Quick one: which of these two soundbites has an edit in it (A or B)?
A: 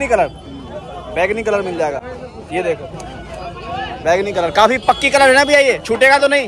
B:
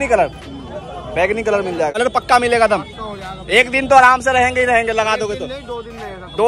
B